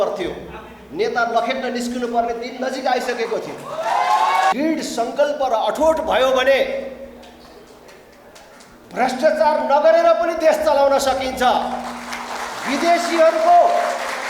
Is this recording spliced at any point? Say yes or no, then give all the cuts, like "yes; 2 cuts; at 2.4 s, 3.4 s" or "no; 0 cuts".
yes; 1 cut; at 4.5 s